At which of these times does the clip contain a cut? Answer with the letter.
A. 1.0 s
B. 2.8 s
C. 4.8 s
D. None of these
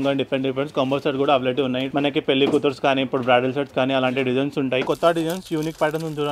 C